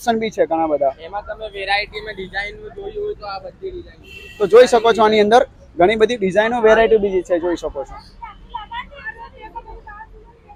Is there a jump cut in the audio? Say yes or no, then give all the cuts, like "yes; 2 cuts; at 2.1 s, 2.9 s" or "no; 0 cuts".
no; 0 cuts